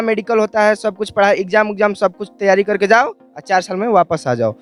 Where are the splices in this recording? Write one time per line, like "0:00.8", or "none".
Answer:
none